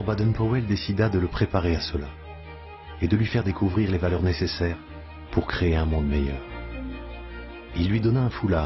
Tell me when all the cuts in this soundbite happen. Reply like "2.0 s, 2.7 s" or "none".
7.6 s